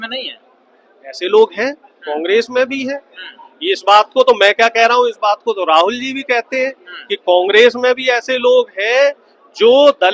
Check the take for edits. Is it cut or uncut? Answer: uncut